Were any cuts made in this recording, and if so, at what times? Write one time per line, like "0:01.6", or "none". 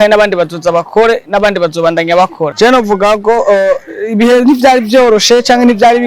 0:02.5